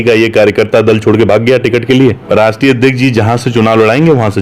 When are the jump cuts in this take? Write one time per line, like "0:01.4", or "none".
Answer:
0:02.2